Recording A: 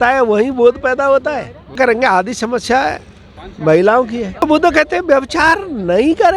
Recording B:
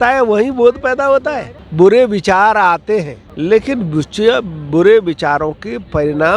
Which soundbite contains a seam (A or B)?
B